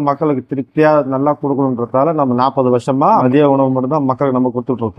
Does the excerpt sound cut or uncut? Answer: uncut